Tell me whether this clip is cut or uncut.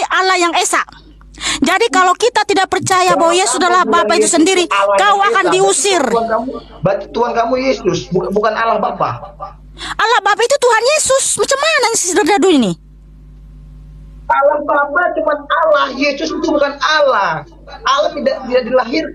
cut